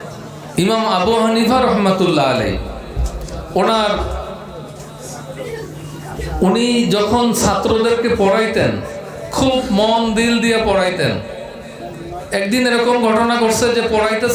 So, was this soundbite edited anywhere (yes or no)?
no